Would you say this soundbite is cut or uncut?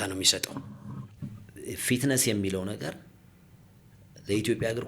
cut